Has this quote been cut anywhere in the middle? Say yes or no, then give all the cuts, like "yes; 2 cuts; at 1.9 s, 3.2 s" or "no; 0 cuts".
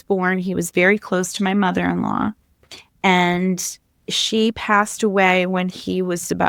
no; 0 cuts